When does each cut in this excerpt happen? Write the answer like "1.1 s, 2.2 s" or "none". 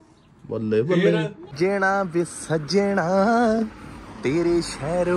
1.5 s